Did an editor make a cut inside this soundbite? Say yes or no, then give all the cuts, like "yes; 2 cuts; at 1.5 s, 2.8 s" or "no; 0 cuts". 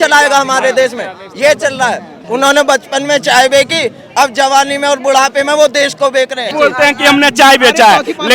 yes; 2 cuts; at 2.1 s, 6.5 s